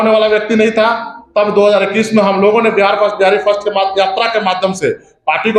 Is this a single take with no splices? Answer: yes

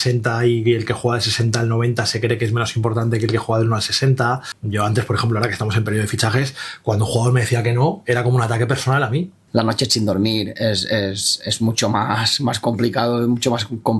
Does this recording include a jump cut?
yes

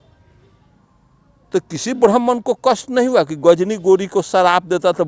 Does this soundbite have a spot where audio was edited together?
no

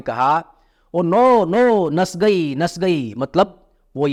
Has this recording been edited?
no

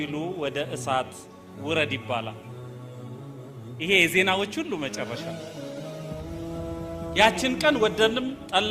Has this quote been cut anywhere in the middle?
yes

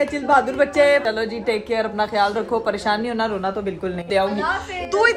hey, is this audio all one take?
no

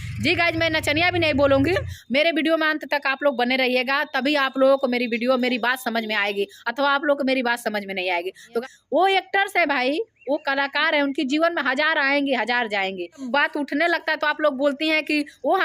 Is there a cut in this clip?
yes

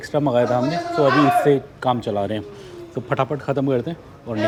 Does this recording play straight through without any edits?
yes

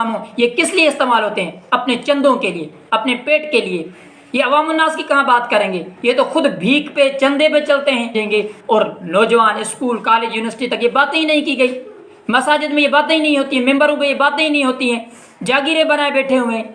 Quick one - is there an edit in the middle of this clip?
yes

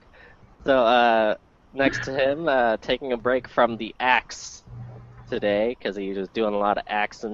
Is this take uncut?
no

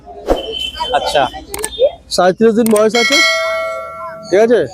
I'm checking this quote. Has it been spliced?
no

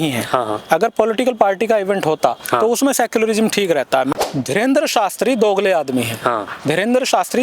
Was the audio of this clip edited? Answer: yes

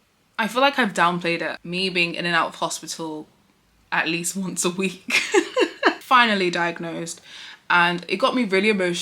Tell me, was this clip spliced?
yes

